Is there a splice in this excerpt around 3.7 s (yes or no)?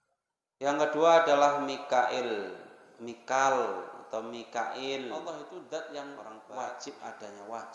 no